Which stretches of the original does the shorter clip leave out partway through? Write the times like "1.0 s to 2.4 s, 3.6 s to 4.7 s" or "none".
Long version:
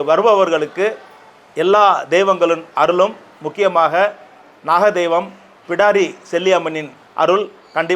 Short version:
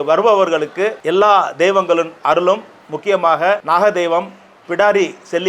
1.0 s to 1.5 s, 4.1 s to 4.6 s